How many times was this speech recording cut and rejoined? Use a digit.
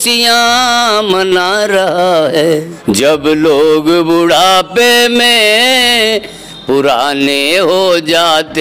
1